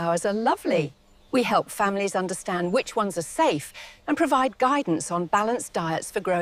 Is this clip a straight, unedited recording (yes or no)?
yes